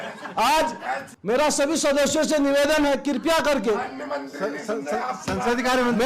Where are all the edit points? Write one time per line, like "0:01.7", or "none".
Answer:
0:01.1